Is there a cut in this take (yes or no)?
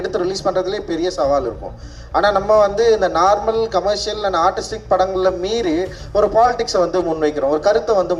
no